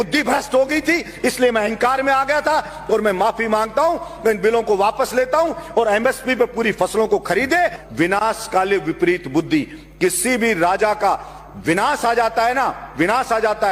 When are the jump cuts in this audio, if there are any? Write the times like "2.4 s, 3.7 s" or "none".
7.8 s